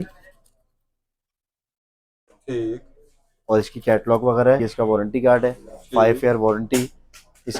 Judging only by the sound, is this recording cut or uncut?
cut